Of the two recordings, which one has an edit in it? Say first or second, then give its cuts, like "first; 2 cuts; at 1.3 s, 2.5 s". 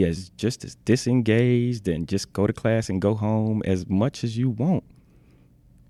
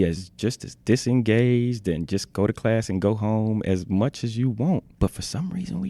second; 1 cut; at 4.9 s